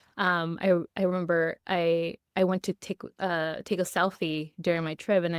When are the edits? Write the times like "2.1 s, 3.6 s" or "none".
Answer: none